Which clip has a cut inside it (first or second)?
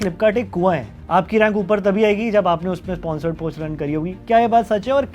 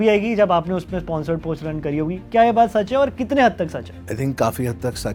first